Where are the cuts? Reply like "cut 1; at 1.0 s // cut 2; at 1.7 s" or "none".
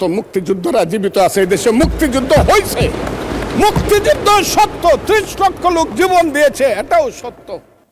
none

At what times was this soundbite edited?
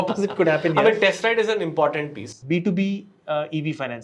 cut 1; at 2.3 s

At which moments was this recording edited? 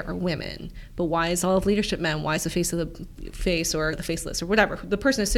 none

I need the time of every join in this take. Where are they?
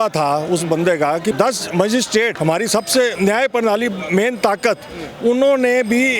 cut 1; at 1.4 s // cut 2; at 2.3 s // cut 3; at 3.1 s

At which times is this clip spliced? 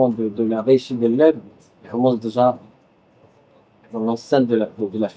none

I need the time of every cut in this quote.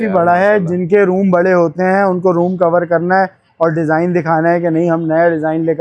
none

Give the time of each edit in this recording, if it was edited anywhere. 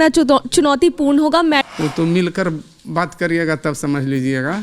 cut 1; at 1.6 s

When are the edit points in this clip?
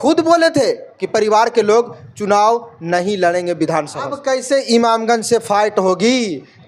cut 1; at 4.2 s

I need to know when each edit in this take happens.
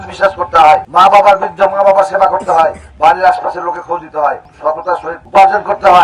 cut 1; at 0.9 s // cut 2; at 4.7 s

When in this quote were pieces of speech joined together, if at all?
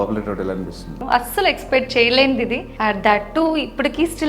cut 1; at 1.0 s // cut 2; at 2.7 s

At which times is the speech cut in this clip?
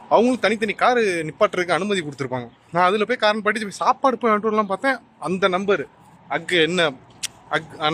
none

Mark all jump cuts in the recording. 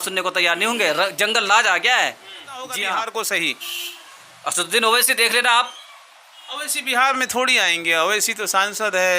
cut 1; at 2.8 s

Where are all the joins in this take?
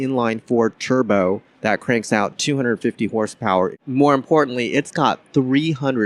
cut 1; at 1.5 s // cut 2; at 3.8 s

